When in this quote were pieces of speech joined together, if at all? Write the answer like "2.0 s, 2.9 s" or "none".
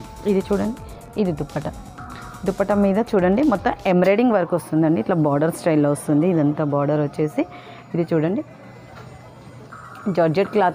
none